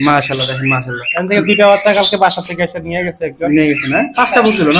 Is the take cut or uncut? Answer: uncut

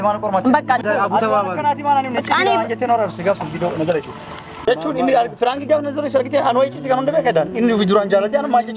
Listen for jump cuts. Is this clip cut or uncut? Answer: cut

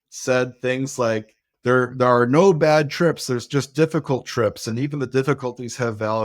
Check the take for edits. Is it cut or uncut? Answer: cut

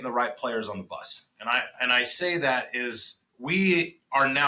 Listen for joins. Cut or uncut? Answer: uncut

